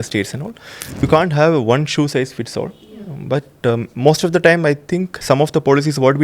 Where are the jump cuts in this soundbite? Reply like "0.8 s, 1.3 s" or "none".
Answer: 1.0 s

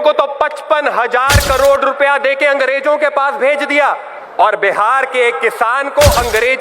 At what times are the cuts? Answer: 4.1 s

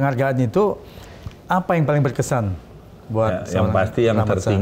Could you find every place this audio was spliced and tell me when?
none

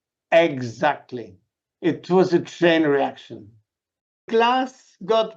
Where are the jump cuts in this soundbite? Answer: 4.3 s

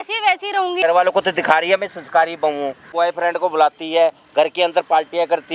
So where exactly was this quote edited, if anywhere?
0.8 s, 2.8 s

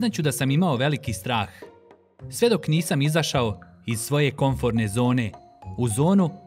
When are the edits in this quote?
none

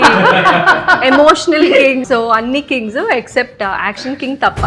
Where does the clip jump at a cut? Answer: 2.0 s

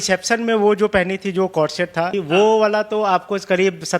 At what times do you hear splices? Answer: 2.2 s

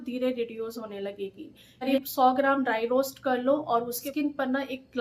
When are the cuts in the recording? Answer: 1.9 s, 4.0 s

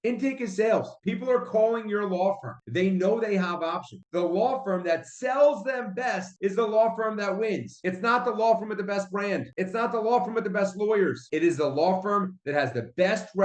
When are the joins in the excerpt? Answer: 4.0 s, 7.7 s, 11.3 s

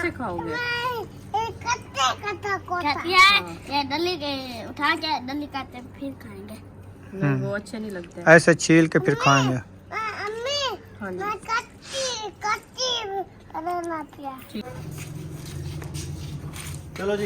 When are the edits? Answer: 14.7 s

